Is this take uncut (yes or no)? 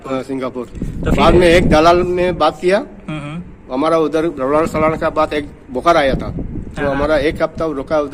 yes